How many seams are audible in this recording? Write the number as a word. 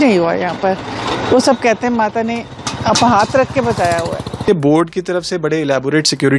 one